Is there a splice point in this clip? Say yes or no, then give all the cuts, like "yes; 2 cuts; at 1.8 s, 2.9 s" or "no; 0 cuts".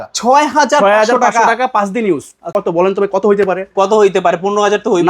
yes; 1 cut; at 2.5 s